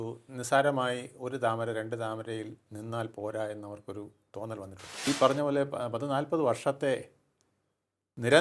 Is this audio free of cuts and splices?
no; 1 cut; at 5.1 s

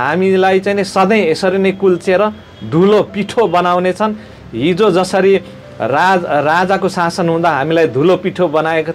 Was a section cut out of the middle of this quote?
no; 0 cuts

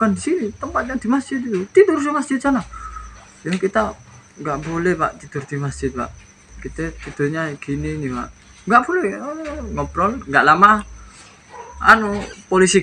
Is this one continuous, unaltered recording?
yes; 0 cuts

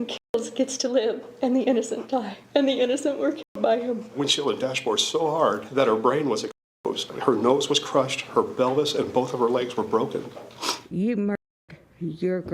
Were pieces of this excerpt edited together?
yes; 5 cuts; at 2.4 s, 4.1 s, 5.7 s, 7.1 s, 10.8 s

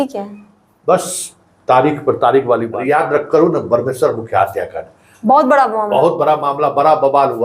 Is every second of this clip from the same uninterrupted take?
no; 1 cut; at 2.7 s

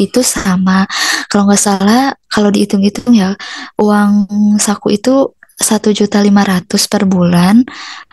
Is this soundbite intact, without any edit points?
yes; 0 cuts

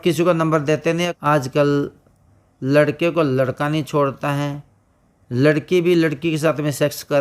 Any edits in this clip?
yes; 1 cut; at 1.0 s

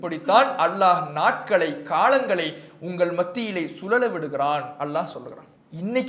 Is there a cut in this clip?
no; 0 cuts

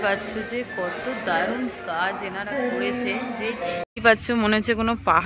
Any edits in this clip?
yes; 1 cut; at 3.9 s

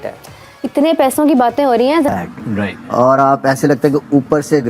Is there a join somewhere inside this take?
yes; 1 cut; at 2.3 s

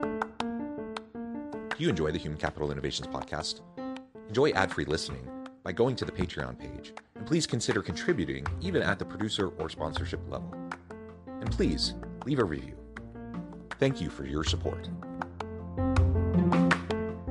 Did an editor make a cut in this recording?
no; 0 cuts

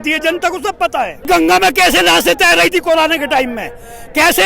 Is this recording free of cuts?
no; 1 cut; at 1.3 s

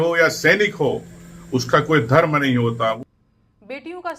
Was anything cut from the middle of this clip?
yes; 1 cut; at 3.0 s

